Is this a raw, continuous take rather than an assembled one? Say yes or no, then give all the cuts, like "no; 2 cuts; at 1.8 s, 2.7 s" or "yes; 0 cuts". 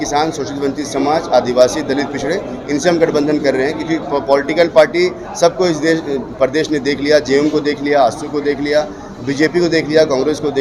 yes; 0 cuts